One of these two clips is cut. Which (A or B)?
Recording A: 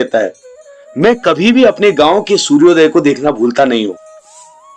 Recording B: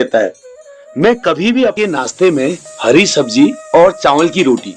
B